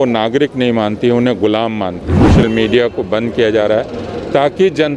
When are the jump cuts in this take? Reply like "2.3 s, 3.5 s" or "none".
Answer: 2.3 s